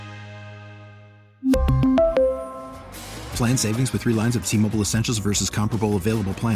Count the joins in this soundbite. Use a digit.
0